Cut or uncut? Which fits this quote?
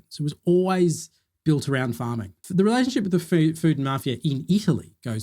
cut